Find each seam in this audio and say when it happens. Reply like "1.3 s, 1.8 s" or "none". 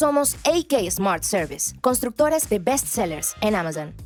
none

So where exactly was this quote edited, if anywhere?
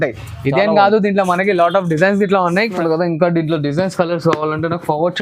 2.8 s

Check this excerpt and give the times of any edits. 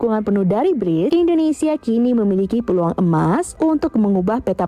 1.1 s, 3.5 s

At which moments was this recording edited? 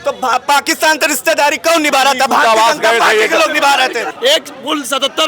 4.1 s

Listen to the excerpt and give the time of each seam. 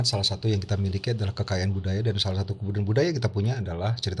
none

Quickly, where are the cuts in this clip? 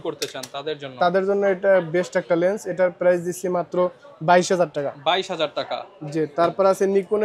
none

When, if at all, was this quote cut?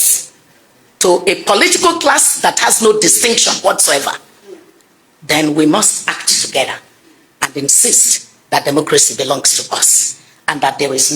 none

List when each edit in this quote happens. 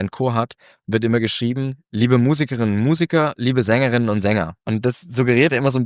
4.6 s

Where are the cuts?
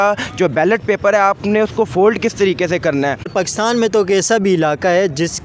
3.3 s

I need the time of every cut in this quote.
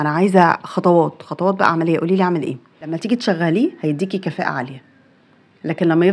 3.0 s

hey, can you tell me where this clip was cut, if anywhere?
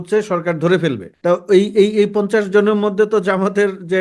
1.1 s

